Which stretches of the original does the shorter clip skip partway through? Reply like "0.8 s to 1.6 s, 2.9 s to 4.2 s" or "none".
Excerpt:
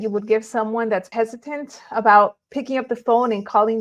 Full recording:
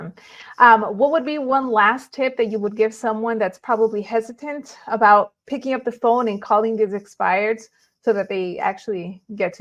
3.6 s to 4.1 s